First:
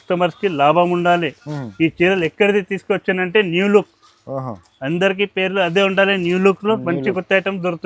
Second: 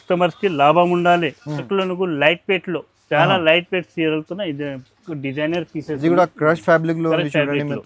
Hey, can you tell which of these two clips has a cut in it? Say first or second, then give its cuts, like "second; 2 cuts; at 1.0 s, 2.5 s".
second; 1 cut; at 1.7 s